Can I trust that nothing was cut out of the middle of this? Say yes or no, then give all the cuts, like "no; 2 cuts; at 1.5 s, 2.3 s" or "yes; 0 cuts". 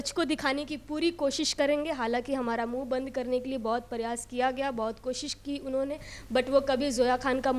yes; 0 cuts